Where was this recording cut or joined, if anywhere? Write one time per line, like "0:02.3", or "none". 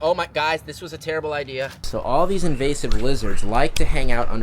0:01.8